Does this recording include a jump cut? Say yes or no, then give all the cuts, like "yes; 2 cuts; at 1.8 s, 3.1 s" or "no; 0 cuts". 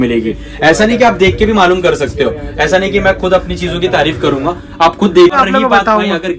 yes; 1 cut; at 5.3 s